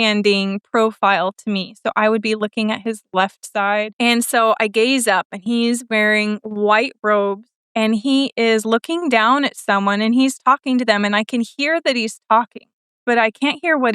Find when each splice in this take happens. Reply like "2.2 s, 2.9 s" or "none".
3.9 s